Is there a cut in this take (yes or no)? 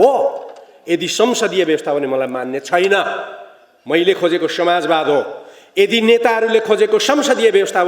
no